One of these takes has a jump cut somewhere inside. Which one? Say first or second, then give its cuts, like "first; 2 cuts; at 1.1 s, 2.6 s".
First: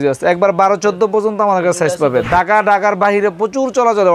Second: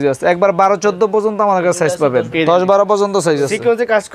first; 1 cut; at 2.3 s